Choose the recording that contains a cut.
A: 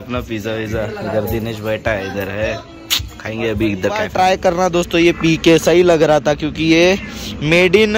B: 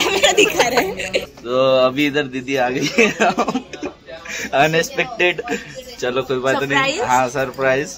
A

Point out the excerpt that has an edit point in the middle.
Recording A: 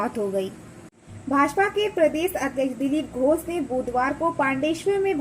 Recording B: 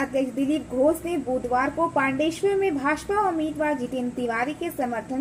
A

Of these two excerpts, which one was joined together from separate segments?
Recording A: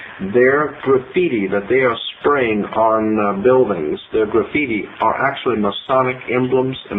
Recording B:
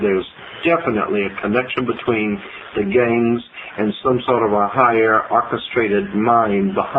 A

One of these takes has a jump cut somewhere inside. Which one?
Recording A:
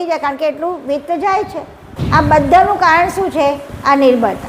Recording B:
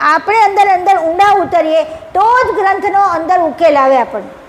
A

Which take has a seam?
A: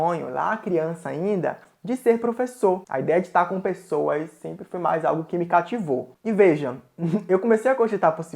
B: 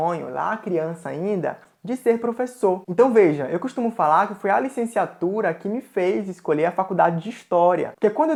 A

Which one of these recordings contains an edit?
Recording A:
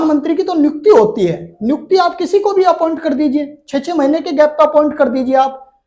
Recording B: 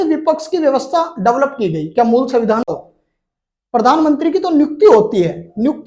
B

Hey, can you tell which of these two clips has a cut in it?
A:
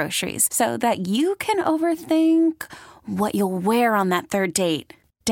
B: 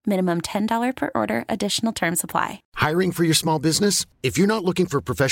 B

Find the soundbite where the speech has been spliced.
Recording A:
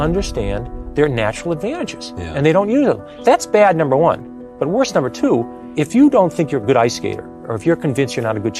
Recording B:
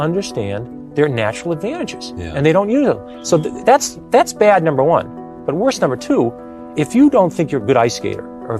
A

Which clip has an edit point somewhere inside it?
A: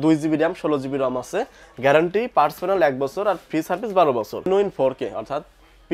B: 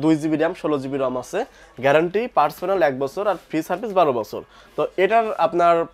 A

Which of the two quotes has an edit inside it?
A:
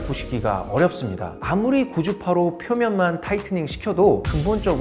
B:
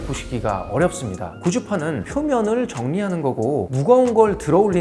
A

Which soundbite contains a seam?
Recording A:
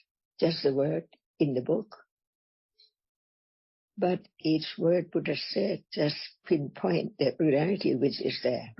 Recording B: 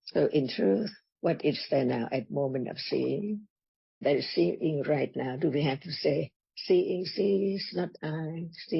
B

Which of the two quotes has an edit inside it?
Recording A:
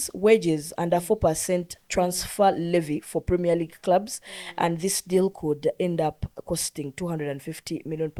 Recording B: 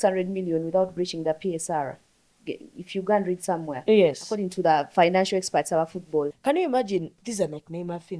B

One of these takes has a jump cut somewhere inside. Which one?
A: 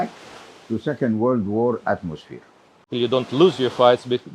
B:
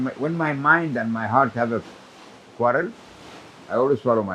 A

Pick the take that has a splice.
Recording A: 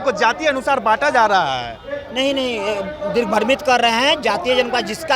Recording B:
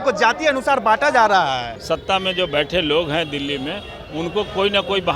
B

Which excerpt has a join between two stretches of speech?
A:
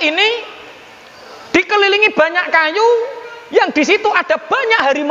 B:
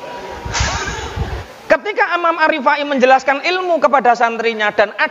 B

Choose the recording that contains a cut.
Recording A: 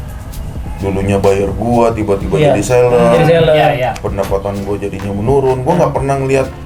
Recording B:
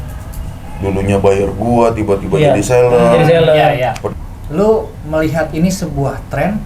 B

